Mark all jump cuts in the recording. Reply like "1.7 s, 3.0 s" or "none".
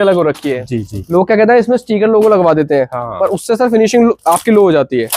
0.9 s